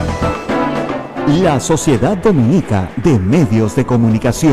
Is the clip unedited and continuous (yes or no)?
no